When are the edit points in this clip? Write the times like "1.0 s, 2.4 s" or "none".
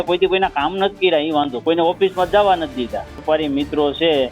3.2 s